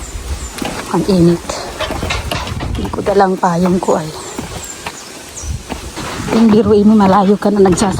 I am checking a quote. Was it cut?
yes; 1 cut; at 6.3 s

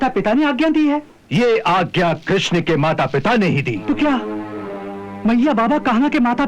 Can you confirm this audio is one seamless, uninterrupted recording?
no; 2 cuts; at 1.2 s, 3.8 s

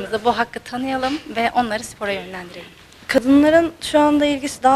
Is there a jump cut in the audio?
yes; 1 cut; at 3.2 s

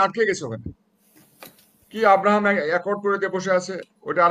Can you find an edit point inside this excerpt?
no; 0 cuts

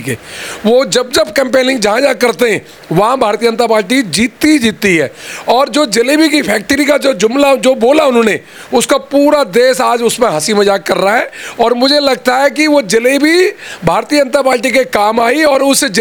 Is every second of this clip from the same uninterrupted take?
yes; 0 cuts

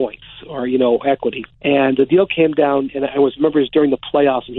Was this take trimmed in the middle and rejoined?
yes; 1 cut; at 1.5 s

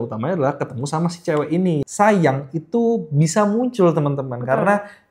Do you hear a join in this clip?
yes; 1 cut; at 1.9 s

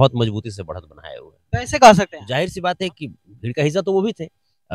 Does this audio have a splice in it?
yes; 1 cut; at 2.2 s

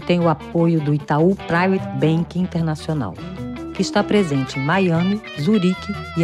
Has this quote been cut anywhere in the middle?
no; 0 cuts

